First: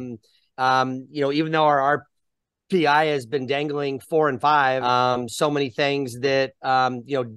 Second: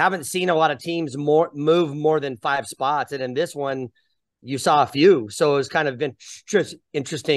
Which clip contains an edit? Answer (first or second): first